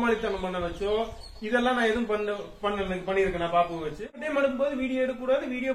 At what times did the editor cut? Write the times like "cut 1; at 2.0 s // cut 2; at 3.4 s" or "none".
cut 1; at 4.2 s